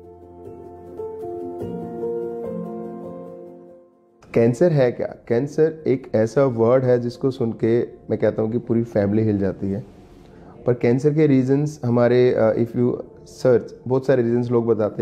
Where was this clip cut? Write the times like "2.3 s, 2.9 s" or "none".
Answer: 0.9 s